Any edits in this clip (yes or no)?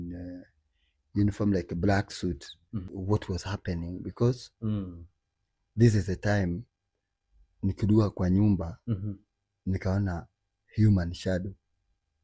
yes